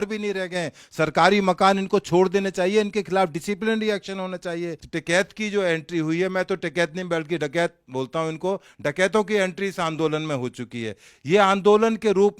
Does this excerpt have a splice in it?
yes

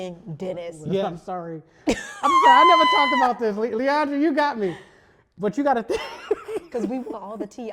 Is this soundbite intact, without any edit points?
no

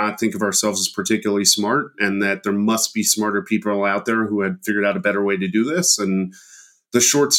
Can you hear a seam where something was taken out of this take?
no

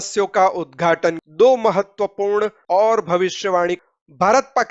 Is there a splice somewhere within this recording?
yes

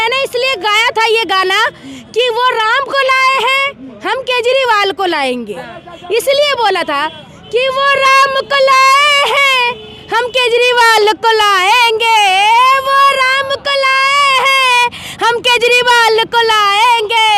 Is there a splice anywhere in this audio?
no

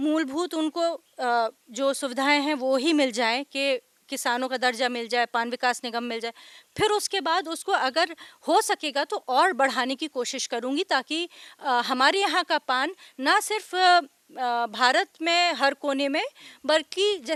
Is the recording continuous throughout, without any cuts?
yes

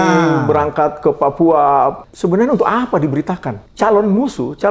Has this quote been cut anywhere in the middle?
yes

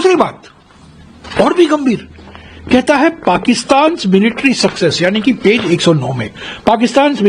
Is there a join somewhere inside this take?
no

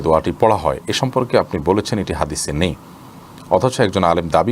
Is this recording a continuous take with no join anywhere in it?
yes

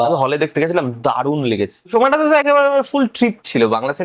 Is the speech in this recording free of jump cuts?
no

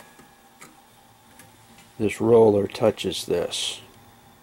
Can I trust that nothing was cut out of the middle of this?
no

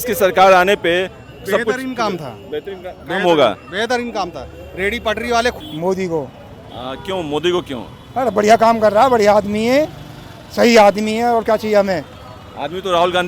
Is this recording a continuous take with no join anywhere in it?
no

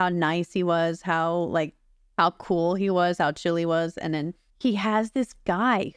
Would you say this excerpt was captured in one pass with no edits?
no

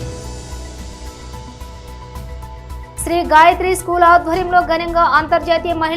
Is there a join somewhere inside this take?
yes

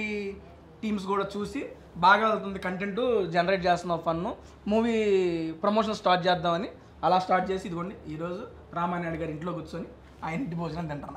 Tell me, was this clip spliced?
no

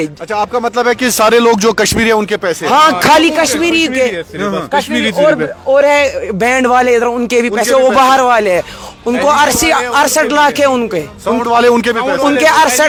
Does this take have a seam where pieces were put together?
no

